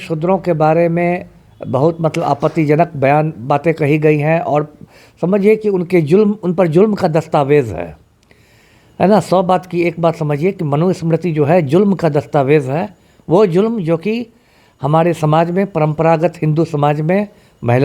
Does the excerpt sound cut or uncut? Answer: uncut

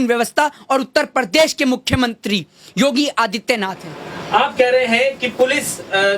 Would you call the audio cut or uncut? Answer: uncut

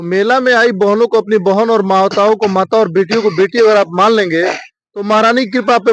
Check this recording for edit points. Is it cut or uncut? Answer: uncut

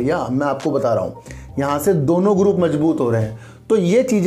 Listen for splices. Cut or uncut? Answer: uncut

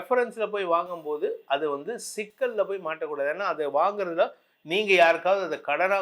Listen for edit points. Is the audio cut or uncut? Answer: uncut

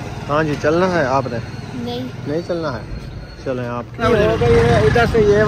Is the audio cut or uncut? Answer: cut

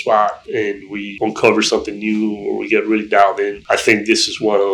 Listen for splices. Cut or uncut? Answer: cut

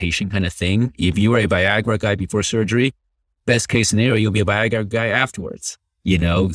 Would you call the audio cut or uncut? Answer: uncut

